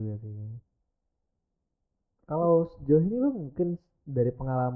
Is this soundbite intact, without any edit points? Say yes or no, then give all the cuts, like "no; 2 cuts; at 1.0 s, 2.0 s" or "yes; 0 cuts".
yes; 0 cuts